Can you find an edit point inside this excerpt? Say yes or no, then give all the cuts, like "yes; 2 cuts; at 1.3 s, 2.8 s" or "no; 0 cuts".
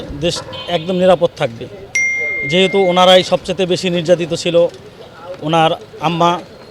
no; 0 cuts